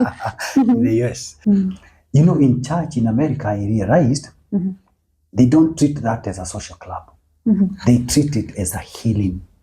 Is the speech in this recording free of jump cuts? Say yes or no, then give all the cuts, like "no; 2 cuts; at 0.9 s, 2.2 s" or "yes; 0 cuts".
no; 1 cut; at 1.3 s